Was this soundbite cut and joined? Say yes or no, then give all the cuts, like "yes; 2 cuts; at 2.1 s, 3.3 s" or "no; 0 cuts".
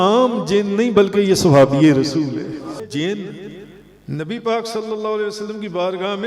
yes; 1 cut; at 2.8 s